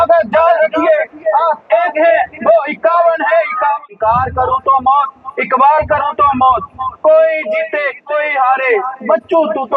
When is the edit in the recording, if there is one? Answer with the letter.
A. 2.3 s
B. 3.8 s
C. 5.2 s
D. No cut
B